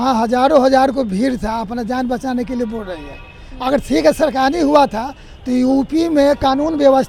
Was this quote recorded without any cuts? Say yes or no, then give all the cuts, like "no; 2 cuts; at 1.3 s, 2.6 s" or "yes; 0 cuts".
yes; 0 cuts